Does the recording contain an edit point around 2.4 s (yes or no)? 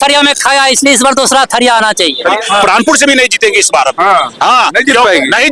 yes